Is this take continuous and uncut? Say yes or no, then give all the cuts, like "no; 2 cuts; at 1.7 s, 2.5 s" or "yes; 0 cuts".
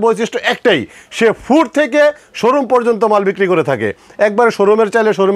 yes; 0 cuts